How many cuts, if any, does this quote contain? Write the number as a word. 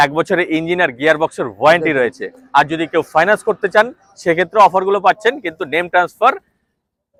zero